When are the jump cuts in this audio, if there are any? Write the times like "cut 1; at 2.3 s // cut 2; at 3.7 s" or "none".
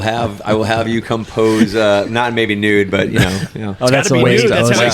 cut 1; at 3.6 s